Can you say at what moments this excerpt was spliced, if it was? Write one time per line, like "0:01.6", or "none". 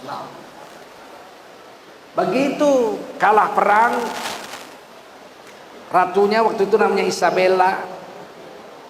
0:01.0